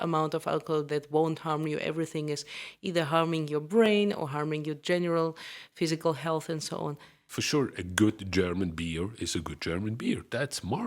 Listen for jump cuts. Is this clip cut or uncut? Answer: cut